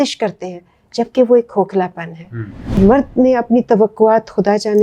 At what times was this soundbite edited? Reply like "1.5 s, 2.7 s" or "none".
2.8 s

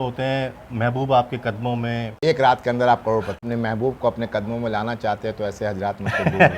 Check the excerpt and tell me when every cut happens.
2.2 s, 3.4 s

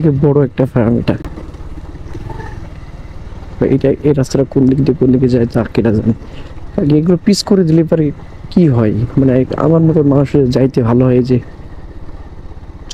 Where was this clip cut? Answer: none

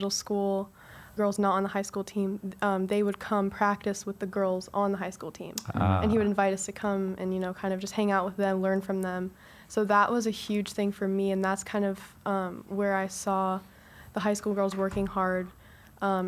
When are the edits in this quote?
1.1 s

